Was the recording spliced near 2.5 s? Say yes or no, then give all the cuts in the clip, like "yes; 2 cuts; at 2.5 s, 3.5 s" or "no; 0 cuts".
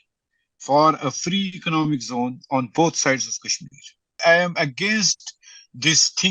no; 1 cut; at 4.1 s